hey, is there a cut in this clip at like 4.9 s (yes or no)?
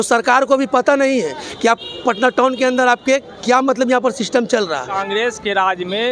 yes